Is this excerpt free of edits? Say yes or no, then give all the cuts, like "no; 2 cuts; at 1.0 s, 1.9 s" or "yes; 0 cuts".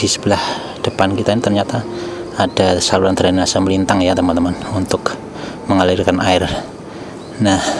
yes; 0 cuts